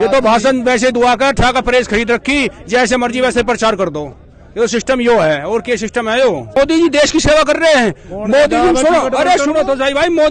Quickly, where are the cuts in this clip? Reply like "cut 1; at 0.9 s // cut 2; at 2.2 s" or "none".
cut 1; at 6.6 s